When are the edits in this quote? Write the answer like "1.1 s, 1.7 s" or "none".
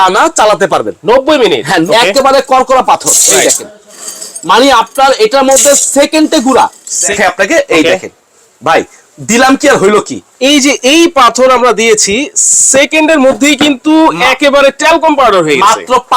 1.7 s, 7.1 s